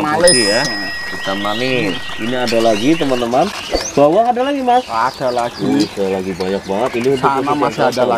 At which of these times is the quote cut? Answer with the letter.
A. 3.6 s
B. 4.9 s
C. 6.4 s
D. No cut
D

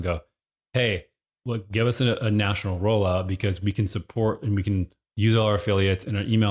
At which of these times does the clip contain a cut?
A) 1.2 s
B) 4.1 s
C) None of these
C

